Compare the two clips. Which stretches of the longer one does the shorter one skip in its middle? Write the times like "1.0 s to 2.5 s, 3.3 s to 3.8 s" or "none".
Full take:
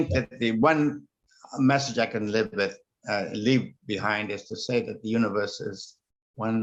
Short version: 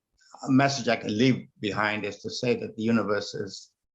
2.1 s to 3.3 s